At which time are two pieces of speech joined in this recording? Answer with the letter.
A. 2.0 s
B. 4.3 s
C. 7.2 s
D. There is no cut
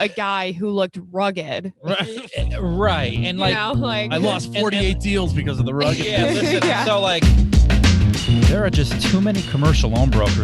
C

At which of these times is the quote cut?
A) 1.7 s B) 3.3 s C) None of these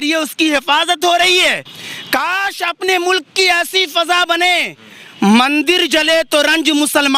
A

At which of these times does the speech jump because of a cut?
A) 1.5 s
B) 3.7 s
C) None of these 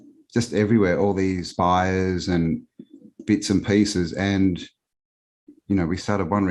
A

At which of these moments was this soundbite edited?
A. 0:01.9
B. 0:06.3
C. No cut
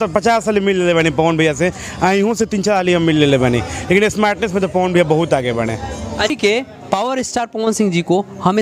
B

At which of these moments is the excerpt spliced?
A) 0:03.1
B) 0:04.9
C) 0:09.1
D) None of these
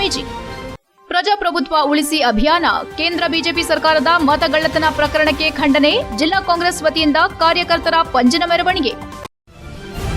C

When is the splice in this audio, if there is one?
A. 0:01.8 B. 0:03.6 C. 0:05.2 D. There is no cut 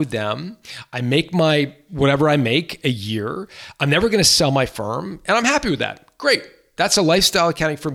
A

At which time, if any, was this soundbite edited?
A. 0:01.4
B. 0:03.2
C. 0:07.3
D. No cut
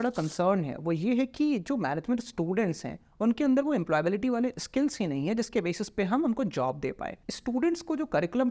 C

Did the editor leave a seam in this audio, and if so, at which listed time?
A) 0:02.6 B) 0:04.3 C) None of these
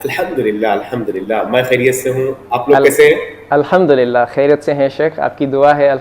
C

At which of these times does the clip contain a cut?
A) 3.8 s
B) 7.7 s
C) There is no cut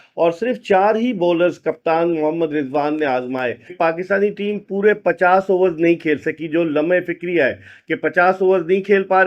A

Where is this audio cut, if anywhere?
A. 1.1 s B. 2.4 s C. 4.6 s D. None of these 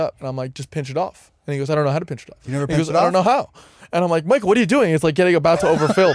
B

